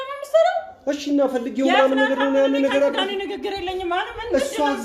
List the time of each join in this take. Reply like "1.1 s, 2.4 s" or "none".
none